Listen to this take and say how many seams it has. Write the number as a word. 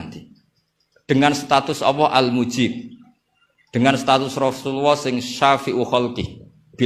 zero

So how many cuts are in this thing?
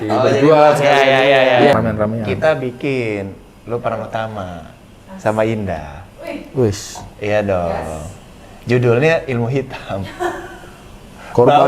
one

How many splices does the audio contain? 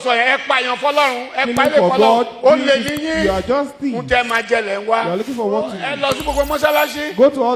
one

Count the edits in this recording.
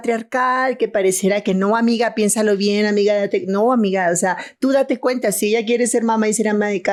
zero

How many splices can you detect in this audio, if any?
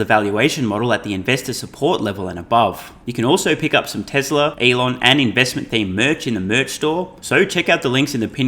three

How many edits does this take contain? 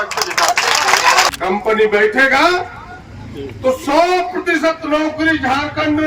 one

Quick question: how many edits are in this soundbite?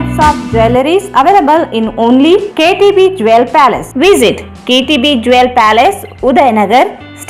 zero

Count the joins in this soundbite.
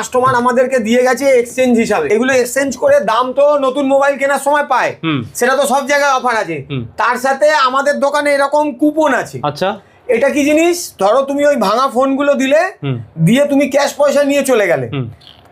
one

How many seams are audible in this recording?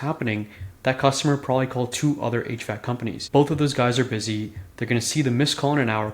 one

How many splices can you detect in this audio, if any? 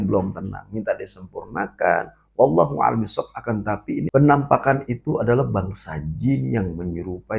one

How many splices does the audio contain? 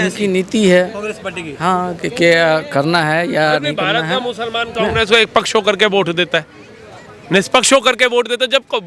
zero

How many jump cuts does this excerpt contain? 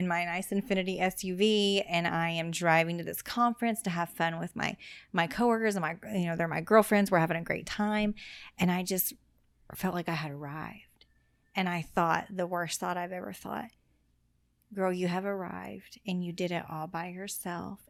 zero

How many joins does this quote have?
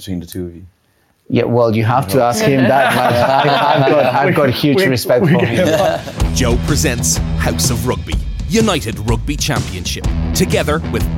one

